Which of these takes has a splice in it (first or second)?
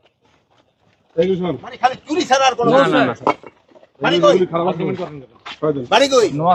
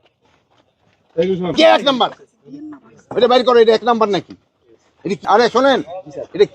second